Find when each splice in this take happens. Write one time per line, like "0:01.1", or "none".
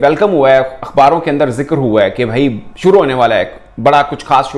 none